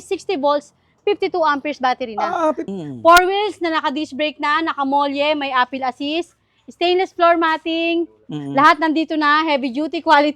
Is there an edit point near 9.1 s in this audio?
no; 1 cut; at 2.6 s

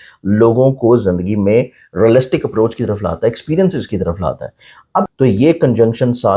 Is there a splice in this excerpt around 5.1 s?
yes; 1 cut; at 5.1 s

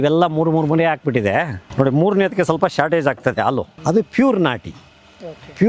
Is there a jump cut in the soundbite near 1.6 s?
yes; 2 cuts; at 1.6 s, 3.7 s

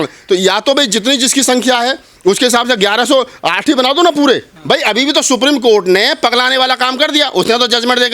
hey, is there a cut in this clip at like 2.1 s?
no; 1 cut; at 4.5 s

